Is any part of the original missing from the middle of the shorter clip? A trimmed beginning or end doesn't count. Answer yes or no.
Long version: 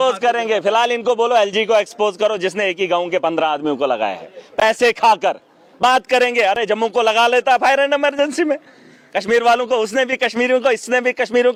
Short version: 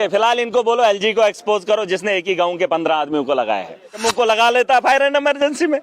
yes